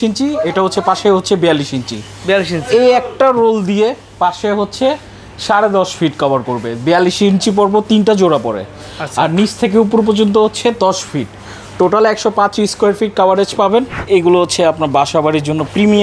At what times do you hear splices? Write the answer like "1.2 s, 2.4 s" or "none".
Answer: 14.0 s